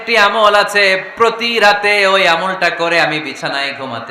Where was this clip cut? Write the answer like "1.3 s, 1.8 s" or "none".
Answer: none